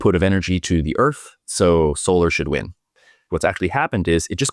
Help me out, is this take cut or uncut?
cut